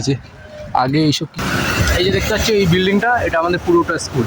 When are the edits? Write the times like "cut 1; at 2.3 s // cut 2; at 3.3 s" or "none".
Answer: cut 1; at 1.3 s